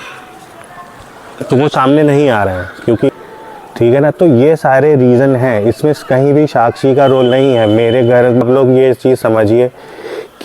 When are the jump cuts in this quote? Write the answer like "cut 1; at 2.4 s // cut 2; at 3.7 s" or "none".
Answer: cut 1; at 3.1 s // cut 2; at 8.4 s